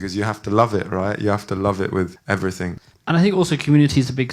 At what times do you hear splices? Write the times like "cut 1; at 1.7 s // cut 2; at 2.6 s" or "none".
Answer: cut 1; at 2.5 s